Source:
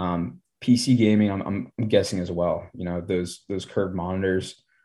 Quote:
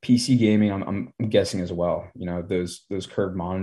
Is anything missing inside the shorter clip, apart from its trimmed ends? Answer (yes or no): no